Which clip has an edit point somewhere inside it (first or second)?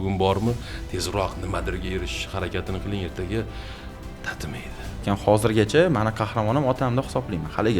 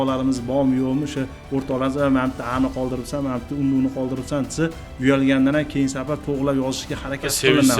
first